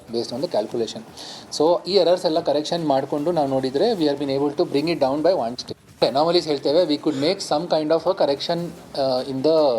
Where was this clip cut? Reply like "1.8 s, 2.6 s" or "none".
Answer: 6.0 s